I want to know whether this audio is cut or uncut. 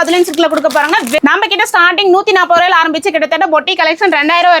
cut